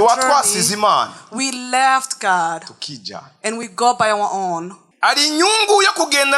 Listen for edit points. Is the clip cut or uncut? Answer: cut